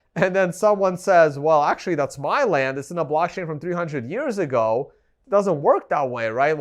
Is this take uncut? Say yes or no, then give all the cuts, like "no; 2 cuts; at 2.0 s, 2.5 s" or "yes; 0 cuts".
no; 1 cut; at 5.1 s